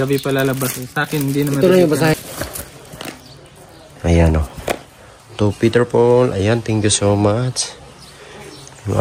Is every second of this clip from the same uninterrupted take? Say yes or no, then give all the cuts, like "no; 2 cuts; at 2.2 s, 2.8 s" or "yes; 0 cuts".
no; 1 cut; at 2.1 s